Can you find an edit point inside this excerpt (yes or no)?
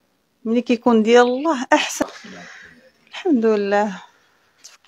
yes